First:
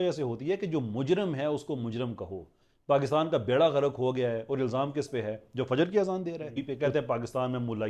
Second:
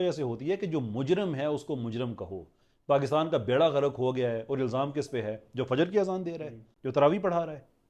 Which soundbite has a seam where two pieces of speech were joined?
first; 1 cut; at 6.6 s

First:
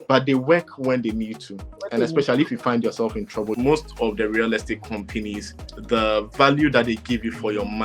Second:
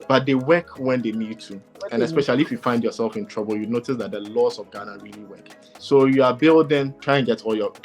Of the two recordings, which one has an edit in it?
first; 1 cut; at 3.5 s

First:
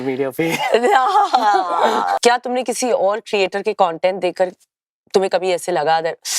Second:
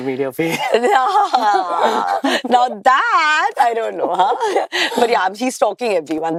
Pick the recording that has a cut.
first; 1 cut; at 2.2 s

